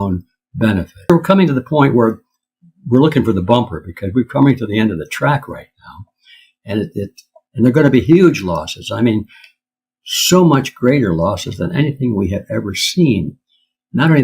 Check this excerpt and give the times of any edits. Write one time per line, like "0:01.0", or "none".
0:01.1